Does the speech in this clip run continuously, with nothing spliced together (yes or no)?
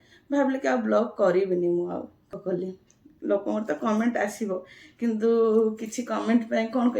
no